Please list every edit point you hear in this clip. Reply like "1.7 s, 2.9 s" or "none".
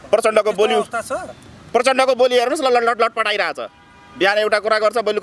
none

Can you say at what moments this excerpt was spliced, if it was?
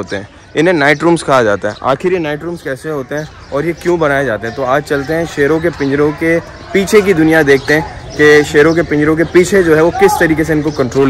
none

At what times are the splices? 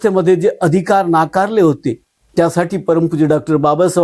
2.1 s

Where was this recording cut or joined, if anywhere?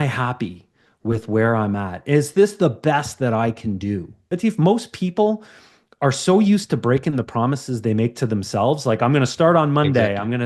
4.3 s

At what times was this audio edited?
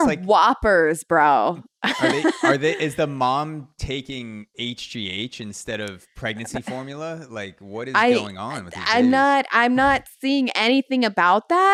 none

